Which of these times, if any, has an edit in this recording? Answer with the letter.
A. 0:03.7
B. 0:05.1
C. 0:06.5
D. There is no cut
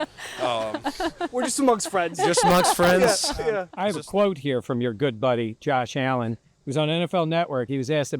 A